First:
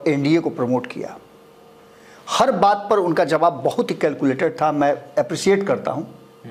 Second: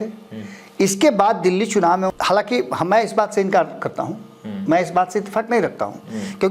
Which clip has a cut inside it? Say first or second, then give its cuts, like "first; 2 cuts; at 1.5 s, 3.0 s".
second; 1 cut; at 2.1 s